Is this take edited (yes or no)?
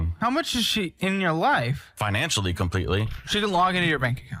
no